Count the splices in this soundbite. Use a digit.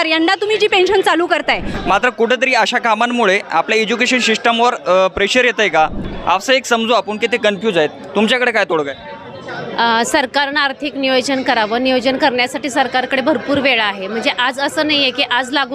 2